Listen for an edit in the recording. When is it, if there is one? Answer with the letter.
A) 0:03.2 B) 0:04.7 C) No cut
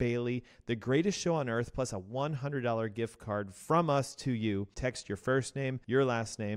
C